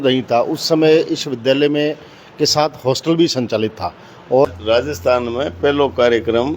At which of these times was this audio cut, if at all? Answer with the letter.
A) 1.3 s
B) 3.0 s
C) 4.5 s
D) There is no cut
C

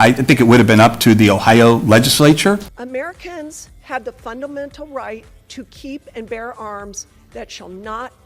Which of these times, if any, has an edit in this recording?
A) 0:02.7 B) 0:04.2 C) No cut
A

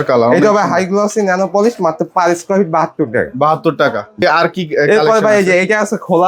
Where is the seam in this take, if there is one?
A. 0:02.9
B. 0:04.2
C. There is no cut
B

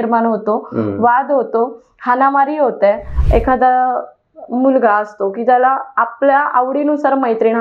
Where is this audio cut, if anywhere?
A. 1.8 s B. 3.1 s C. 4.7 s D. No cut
B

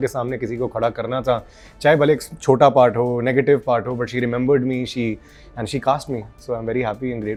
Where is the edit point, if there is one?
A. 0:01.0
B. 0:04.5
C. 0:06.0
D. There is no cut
D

